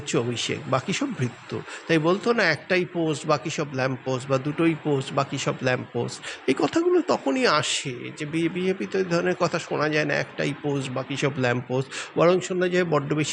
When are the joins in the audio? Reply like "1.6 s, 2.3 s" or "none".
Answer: none